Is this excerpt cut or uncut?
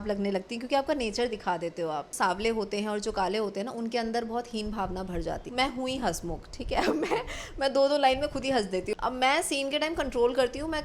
cut